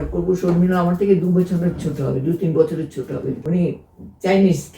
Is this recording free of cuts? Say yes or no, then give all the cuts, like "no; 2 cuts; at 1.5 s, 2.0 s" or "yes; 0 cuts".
no; 1 cut; at 3.4 s